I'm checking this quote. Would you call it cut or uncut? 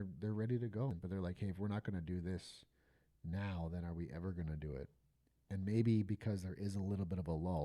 cut